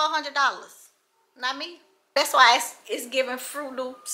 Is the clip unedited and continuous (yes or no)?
no